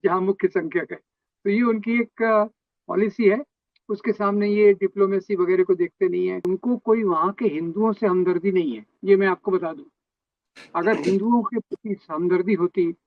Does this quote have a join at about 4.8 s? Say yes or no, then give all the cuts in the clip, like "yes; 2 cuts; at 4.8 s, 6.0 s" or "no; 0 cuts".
no; 1 cut; at 6.4 s